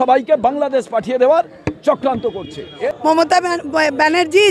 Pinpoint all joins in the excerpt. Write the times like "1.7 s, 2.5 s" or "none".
2.8 s